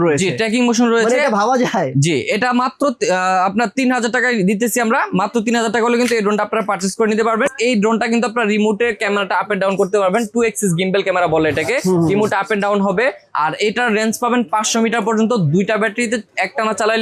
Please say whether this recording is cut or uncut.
cut